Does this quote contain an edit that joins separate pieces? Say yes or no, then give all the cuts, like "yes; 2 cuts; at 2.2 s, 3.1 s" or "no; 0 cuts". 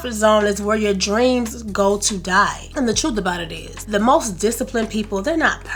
no; 0 cuts